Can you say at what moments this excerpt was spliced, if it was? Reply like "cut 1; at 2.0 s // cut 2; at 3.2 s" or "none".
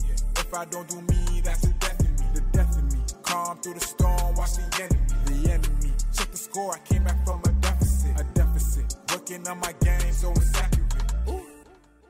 none